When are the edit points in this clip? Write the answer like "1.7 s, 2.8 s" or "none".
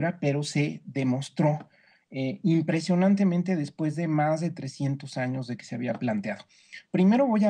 0.9 s